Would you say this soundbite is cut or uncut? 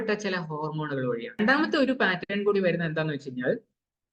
cut